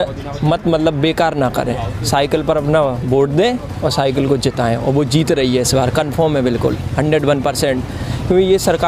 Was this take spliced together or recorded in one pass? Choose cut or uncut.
uncut